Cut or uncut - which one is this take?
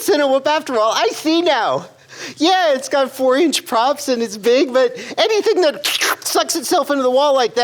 uncut